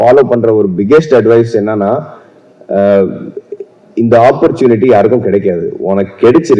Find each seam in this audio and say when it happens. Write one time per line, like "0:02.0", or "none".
none